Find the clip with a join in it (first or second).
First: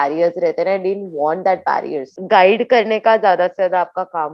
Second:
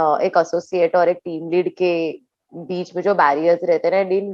first